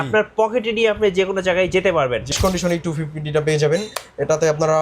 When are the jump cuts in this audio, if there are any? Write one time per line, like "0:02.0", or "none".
0:02.3